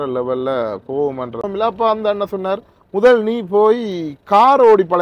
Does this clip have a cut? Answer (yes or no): yes